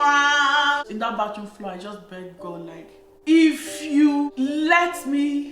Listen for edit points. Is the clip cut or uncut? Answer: cut